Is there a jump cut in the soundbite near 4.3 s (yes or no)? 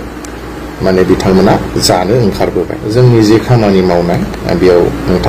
no